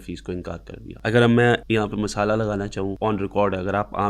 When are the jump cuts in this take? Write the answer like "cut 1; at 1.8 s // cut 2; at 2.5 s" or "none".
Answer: cut 1; at 0.9 s // cut 2; at 1.6 s // cut 3; at 3.0 s